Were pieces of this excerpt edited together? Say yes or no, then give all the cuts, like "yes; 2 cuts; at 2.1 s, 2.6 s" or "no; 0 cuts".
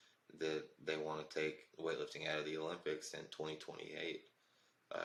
no; 0 cuts